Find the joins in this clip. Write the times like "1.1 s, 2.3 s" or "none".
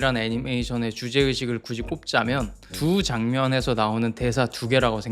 2.6 s